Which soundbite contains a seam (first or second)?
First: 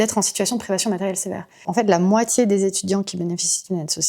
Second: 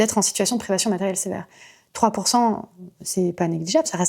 first